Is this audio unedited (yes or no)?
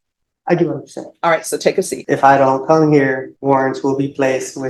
no